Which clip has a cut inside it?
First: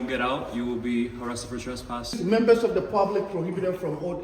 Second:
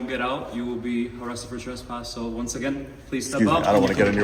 first; 1 cut; at 2.2 s

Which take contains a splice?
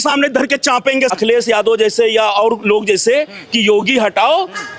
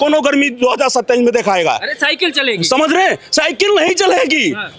first; 1 cut; at 1.1 s

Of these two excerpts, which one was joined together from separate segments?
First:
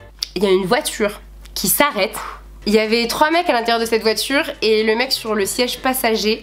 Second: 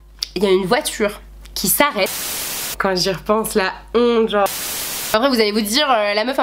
second; 2 cuts; at 2.6 s, 5.0 s

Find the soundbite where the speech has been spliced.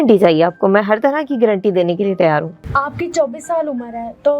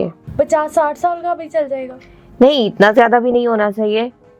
first; 1 cut; at 2.6 s

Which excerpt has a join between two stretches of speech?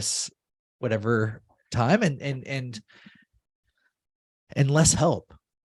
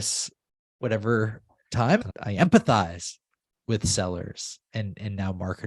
second; 1 cut; at 2.0 s

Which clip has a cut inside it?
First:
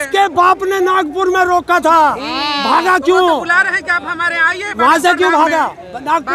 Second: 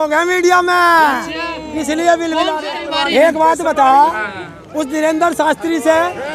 second; 1 cut; at 2.8 s

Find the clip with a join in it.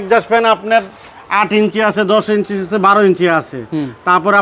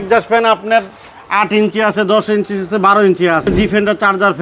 second; 1 cut; at 3.5 s

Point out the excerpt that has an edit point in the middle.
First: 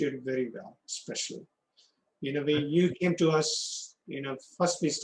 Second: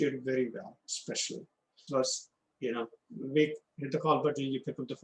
second; 1 cut; at 1.8 s

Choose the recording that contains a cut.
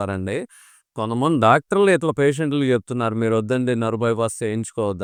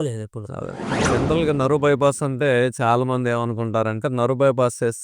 second; 1 cut; at 0.9 s

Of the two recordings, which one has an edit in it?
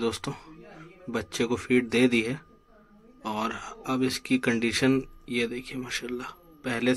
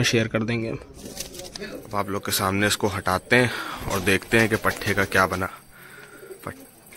second; 1 cut; at 1.8 s

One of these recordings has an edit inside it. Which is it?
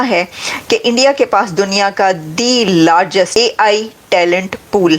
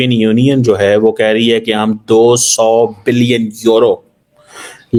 first; 1 cut; at 3.3 s

